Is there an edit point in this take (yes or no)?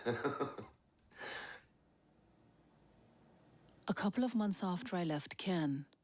yes